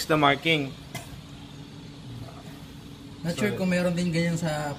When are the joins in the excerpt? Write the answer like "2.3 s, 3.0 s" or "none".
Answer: none